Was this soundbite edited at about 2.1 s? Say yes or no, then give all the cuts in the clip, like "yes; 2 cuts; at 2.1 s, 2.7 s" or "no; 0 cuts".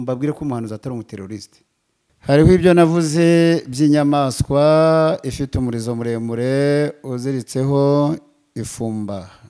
yes; 1 cut; at 2.1 s